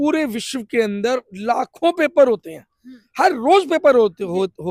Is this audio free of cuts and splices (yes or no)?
yes